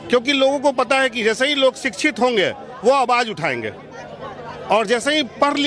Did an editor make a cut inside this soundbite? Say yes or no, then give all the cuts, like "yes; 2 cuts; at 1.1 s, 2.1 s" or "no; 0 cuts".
no; 0 cuts